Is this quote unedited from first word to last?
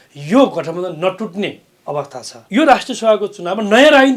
no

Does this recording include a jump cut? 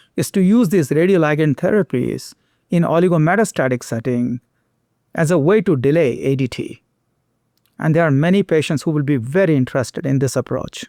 no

